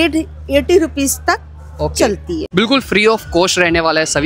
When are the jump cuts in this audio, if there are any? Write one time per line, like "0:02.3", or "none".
0:02.5